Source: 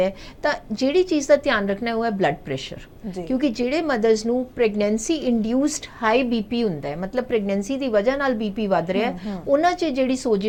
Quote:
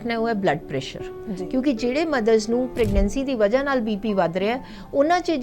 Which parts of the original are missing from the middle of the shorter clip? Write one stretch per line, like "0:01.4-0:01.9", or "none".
0:04.5-0:07.3